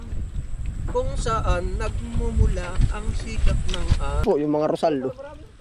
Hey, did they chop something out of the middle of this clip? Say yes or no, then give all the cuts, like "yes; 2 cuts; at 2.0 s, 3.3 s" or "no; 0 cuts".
yes; 1 cut; at 4.2 s